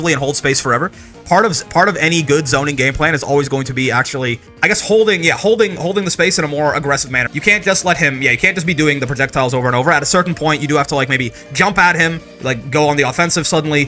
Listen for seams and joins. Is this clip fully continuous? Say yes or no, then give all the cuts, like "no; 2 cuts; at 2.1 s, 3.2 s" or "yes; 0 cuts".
no; 2 cuts; at 4.5 s, 7.2 s